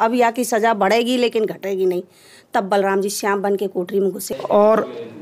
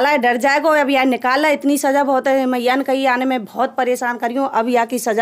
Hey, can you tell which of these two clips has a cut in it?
first; 1 cut; at 4.3 s

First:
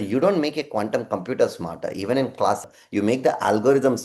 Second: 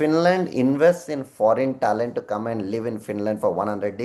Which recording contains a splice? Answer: first; 1 cut; at 2.7 s

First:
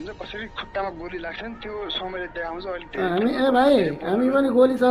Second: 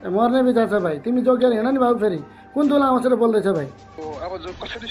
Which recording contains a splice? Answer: second; 1 cut; at 4.0 s

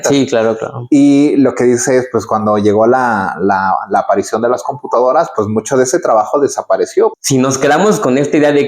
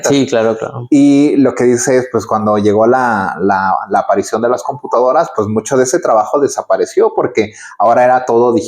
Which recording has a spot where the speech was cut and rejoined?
first; 1 cut; at 7.1 s

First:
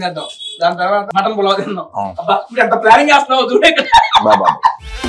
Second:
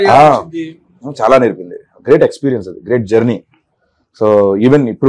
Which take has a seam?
first; 1 cut; at 1.1 s

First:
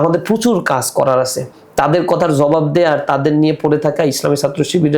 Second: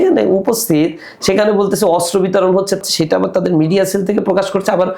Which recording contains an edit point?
second; 1 cut; at 2.8 s

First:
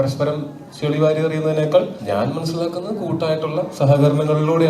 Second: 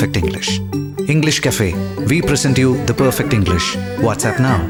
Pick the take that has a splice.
first; 1 cut; at 2.0 s

